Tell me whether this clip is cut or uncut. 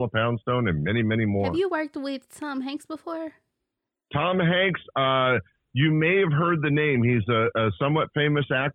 cut